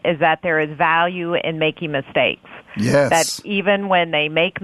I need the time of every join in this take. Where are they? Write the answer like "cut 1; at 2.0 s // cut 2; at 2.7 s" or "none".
none